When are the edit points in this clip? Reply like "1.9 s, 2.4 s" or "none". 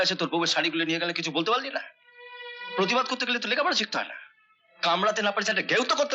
none